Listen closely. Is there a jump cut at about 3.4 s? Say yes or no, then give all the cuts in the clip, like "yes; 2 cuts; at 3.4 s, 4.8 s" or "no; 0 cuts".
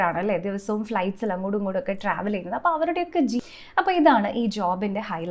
yes; 1 cut; at 3.4 s